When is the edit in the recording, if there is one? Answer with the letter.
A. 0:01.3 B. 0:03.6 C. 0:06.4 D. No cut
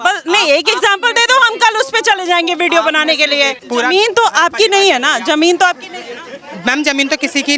B